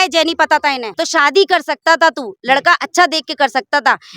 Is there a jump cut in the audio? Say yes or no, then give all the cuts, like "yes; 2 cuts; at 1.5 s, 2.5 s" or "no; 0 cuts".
yes; 1 cut; at 0.9 s